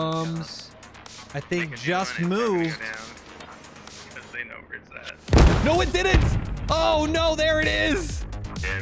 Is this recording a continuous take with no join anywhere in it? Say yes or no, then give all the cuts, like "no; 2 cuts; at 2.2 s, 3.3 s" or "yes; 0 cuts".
yes; 0 cuts